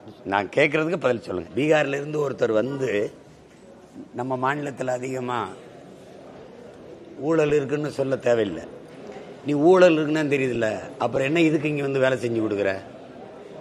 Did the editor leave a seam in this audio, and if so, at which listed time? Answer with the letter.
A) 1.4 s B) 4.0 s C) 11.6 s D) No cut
A